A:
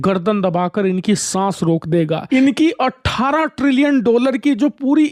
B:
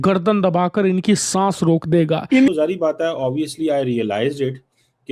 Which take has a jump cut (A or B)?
B